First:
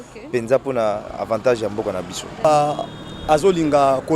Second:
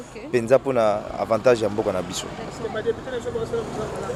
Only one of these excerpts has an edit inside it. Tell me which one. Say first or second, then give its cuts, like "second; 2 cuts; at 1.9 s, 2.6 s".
first; 1 cut; at 2.4 s